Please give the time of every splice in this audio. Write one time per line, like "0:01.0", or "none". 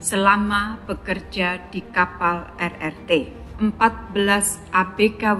0:03.4